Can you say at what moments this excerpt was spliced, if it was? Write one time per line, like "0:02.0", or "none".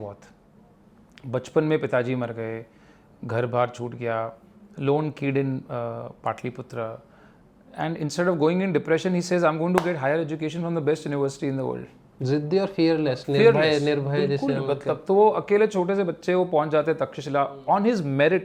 none